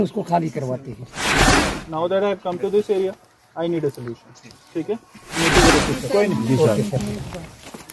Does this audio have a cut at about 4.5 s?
no; 2 cuts; at 1.5 s, 5.7 s

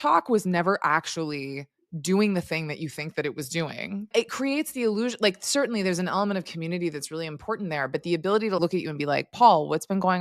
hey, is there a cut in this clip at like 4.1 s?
yes; 2 cuts; at 4.1 s, 8.6 s

